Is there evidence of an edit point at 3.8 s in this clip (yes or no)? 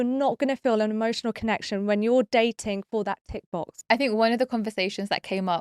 yes